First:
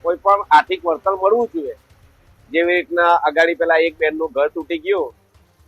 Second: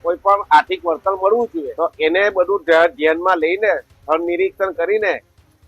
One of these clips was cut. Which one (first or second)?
second